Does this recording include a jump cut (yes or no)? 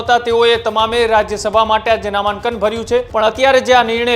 yes